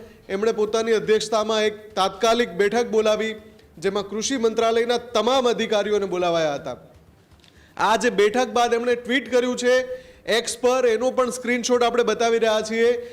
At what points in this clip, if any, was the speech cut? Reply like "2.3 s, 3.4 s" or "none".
none

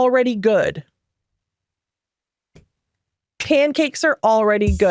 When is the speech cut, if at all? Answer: none

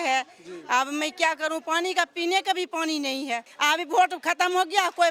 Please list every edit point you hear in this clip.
3.5 s

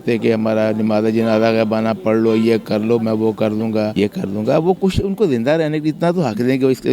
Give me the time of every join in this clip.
3.9 s

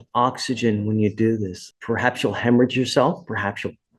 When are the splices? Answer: 1.6 s

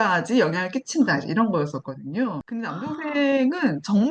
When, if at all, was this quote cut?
2.4 s

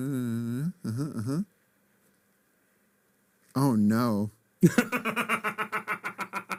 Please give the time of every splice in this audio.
none

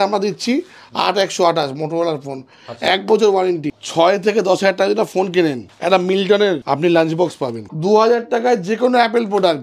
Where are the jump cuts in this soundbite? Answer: 3.7 s, 5.7 s, 6.6 s, 7.7 s

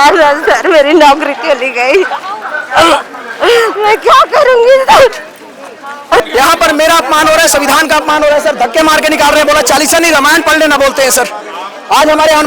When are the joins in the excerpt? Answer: 6.2 s

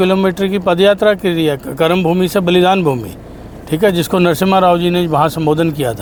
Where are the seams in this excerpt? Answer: none

